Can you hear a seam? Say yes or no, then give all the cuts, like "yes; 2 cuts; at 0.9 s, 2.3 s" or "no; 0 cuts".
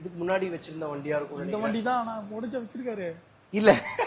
no; 0 cuts